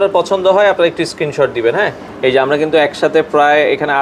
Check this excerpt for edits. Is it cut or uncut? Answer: uncut